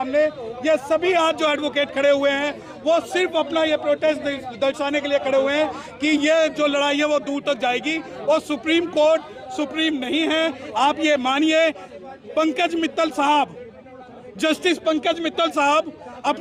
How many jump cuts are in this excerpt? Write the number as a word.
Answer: zero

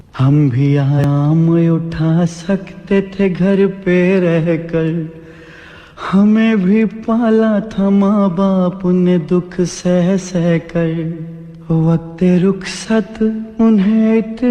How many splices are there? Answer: one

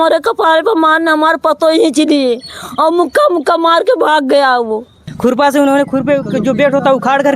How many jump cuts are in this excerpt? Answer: one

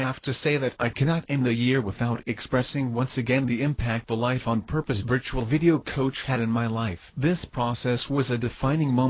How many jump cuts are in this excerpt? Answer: zero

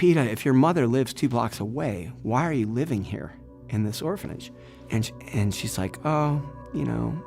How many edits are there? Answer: one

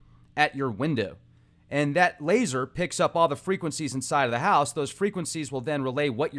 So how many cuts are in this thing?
zero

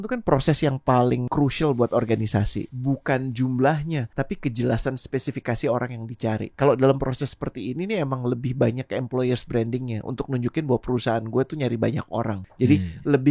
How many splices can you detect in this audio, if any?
five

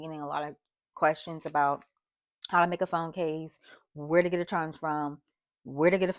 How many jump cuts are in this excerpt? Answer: zero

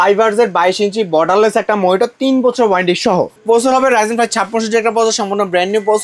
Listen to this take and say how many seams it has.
one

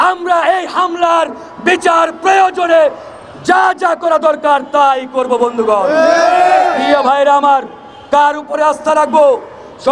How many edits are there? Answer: zero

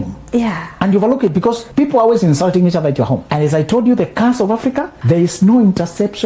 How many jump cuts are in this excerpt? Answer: three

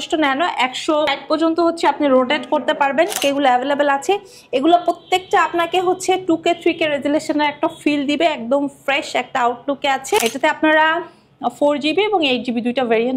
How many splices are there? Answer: three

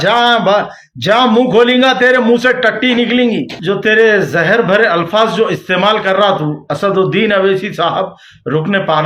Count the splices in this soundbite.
one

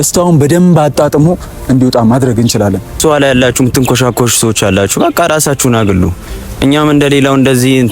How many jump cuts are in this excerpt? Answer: one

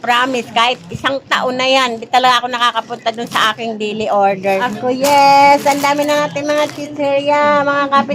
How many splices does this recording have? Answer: one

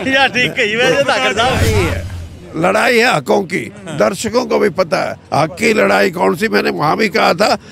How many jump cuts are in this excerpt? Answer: one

